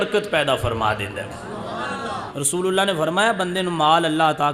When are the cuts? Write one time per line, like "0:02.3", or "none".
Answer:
0:02.3